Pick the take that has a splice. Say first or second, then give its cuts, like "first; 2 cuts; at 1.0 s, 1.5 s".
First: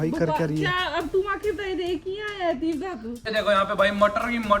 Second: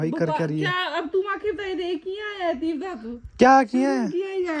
first; 1 cut; at 3.3 s